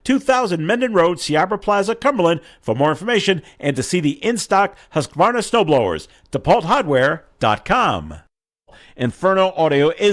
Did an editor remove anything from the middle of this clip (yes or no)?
yes